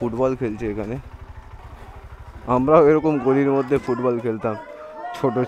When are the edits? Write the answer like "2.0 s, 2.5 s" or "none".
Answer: 1.6 s